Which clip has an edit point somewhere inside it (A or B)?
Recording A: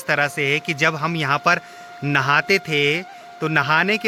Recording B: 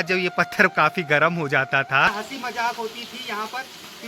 B